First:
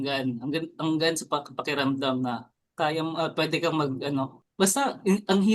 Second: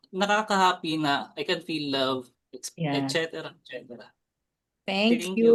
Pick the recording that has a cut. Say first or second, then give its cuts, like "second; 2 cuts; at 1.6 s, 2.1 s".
first; 2 cuts; at 2.6 s, 4.4 s